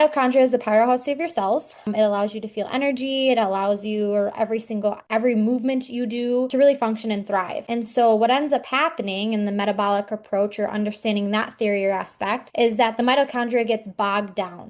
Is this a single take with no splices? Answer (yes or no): yes